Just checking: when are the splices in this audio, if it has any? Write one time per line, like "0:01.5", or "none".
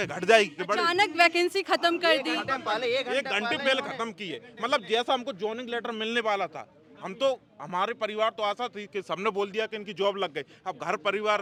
none